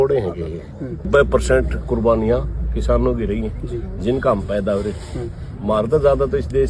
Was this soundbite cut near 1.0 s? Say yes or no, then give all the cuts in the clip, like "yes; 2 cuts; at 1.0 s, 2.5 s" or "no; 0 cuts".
yes; 1 cut; at 1.0 s